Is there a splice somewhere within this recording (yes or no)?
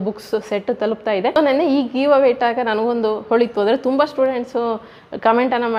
yes